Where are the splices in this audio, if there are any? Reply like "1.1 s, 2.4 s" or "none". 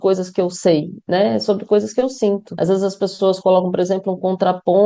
2.5 s